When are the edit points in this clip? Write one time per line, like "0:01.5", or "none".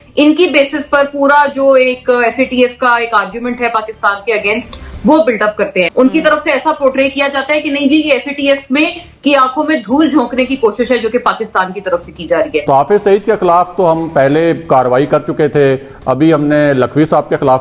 0:05.9
0:12.6